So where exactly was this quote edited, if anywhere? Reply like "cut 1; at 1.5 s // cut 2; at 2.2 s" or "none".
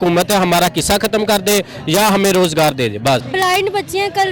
cut 1; at 3.3 s